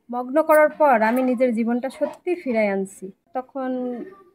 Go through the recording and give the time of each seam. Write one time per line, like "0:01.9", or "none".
0:03.4